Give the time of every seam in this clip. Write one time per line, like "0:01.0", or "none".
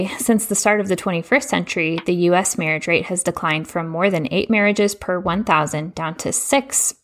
none